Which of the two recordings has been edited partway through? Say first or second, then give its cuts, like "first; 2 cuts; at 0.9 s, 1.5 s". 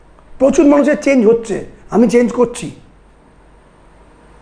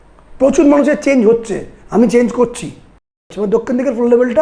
second; 1 cut; at 3.3 s